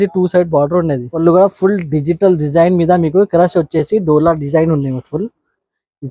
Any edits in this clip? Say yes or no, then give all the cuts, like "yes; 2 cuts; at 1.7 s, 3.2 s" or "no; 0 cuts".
yes; 1 cut; at 1.1 s